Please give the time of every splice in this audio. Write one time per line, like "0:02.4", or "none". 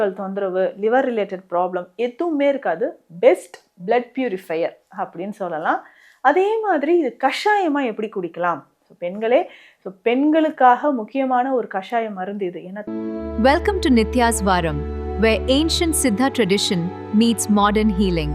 0:12.8